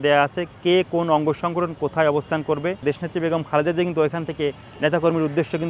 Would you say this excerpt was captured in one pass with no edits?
no; 1 cut; at 2.8 s

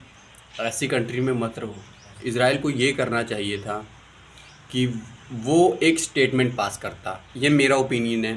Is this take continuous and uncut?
no; 1 cut; at 2.1 s

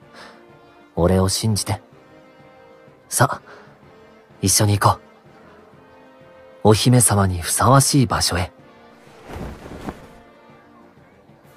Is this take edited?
no; 0 cuts

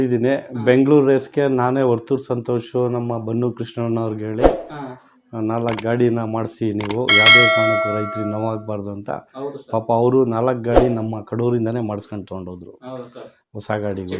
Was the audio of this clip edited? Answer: no; 0 cuts

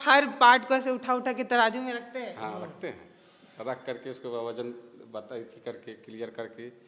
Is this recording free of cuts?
yes; 0 cuts

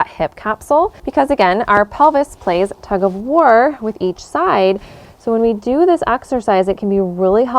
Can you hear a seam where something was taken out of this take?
yes; 1 cut; at 1.0 s

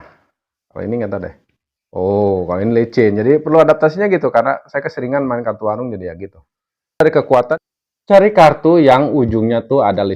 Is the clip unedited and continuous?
no; 1 cut; at 7.5 s

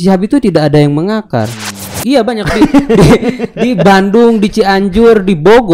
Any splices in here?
yes; 1 cut; at 1.9 s

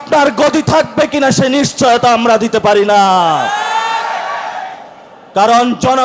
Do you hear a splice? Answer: no; 0 cuts

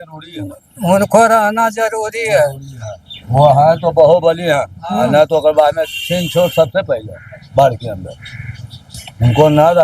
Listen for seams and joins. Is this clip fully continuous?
yes; 0 cuts

